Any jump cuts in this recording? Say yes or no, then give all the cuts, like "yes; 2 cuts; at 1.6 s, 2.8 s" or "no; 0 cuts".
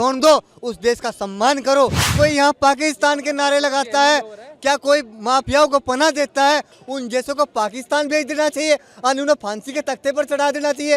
yes; 1 cut; at 2.0 s